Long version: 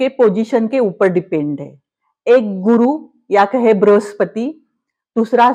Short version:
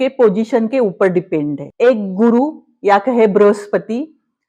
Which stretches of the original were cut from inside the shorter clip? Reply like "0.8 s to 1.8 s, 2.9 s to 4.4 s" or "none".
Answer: 1.6 s to 2.1 s